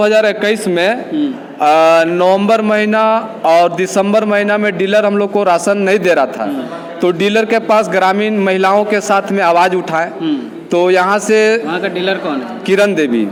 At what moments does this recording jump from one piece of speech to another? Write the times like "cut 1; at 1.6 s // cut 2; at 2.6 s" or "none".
none